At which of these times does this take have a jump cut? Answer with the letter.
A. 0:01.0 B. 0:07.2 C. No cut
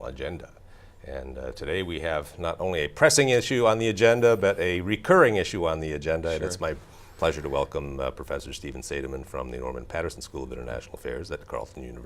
A